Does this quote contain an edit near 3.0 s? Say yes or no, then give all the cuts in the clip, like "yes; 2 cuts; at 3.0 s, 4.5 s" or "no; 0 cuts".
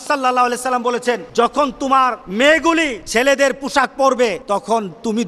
yes; 4 cuts; at 1.2 s, 2.2 s, 3.0 s, 4.4 s